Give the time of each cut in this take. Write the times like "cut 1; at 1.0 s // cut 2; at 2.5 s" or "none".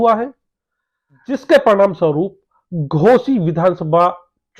cut 1; at 1.4 s